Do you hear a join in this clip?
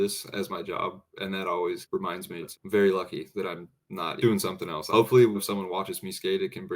yes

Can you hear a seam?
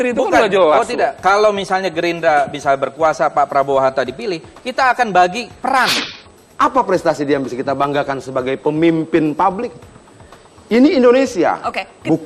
yes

